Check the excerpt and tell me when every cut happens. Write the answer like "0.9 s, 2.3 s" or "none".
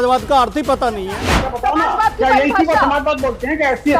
1.5 s